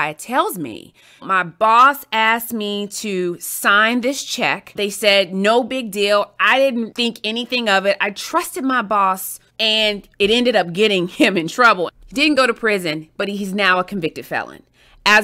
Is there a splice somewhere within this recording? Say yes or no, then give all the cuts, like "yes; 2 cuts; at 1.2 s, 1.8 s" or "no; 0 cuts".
yes; 5 cuts; at 1.3 s, 4.7 s, 6.9 s, 9.9 s, 11.9 s